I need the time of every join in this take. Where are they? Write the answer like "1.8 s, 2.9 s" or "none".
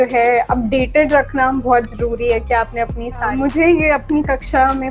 3.3 s